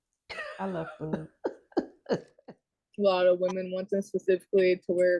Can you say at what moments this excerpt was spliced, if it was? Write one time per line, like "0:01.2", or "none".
0:02.3